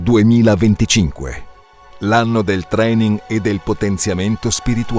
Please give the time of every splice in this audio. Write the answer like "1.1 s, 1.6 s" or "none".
none